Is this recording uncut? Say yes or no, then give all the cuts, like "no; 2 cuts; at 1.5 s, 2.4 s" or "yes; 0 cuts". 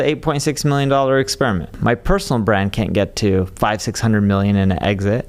no; 1 cut; at 1.7 s